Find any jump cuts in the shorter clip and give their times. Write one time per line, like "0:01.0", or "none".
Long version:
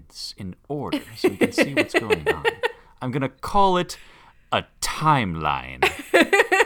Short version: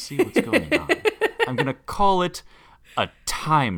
0:01.6